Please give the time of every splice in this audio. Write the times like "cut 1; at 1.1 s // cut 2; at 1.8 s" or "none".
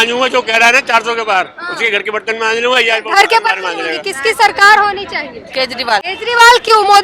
cut 1; at 4.0 s // cut 2; at 6.1 s